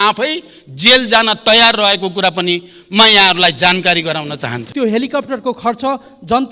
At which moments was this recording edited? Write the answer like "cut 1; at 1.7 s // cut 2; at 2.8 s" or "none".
cut 1; at 4.6 s